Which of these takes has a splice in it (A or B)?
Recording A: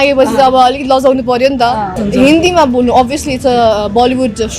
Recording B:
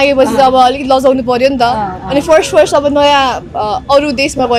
A